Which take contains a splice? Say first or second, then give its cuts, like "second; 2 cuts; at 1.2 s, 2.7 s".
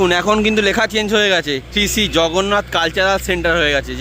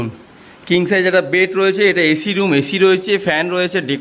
first; 1 cut; at 1.7 s